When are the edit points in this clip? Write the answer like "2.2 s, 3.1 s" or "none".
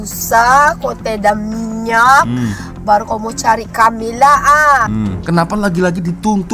5.2 s